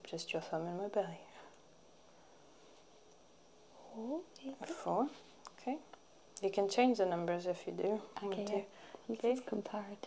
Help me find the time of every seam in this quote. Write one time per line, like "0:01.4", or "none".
none